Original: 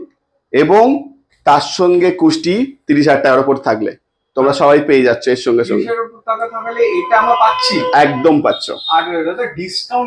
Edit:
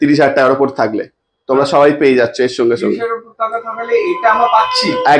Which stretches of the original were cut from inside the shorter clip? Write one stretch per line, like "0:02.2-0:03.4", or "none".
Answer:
none